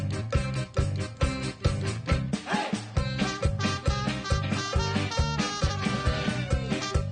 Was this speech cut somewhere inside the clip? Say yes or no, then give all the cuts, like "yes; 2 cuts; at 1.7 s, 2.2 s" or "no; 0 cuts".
no; 0 cuts